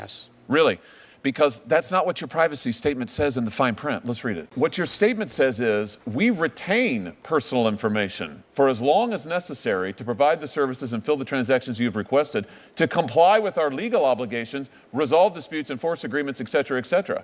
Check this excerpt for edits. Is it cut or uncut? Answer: cut